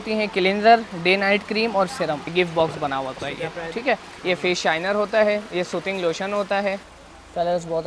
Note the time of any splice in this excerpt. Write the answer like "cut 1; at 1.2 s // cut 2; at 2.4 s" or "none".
cut 1; at 2.2 s // cut 2; at 4.1 s // cut 3; at 6.9 s